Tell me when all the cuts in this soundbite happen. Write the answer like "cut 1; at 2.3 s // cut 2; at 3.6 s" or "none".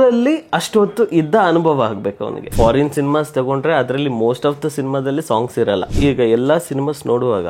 cut 1; at 2.5 s // cut 2; at 5.9 s